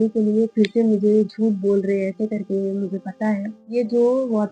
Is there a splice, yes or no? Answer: yes